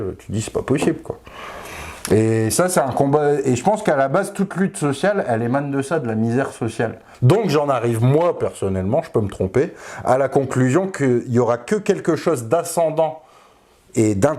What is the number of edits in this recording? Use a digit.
1